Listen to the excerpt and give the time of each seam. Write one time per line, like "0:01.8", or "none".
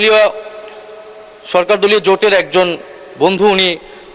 none